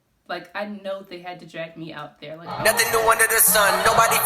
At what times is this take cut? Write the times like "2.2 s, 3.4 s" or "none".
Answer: 2.5 s